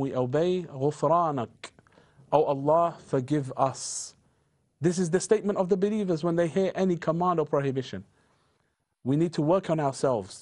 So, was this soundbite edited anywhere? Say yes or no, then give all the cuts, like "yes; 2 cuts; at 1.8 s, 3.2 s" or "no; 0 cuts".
no; 0 cuts